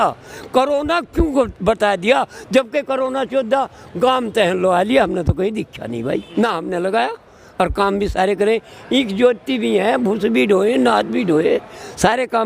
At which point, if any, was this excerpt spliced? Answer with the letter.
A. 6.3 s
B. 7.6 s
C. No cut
A